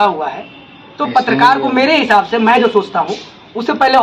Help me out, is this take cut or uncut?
uncut